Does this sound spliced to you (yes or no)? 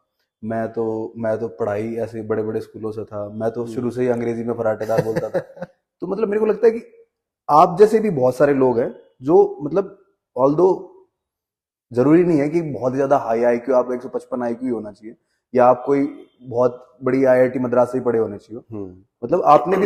no